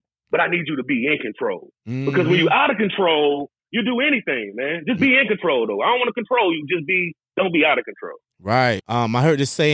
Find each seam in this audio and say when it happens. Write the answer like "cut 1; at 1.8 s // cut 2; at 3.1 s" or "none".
cut 1; at 8.8 s